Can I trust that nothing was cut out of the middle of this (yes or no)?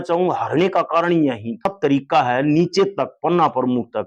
no